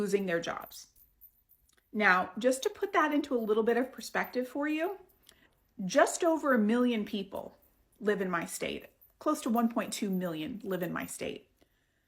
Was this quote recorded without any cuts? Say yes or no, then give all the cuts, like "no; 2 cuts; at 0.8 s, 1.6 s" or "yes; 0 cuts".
yes; 0 cuts